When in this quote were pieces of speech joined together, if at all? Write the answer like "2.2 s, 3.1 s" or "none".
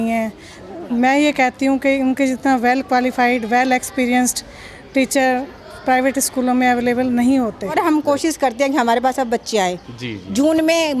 7.7 s